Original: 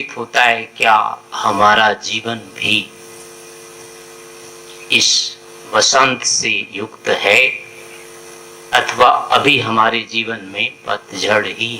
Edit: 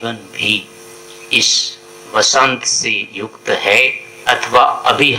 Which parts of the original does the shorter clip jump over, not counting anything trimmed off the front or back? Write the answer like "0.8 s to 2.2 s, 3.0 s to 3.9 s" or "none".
3.2 s to 4.5 s, 7.7 s to 8.5 s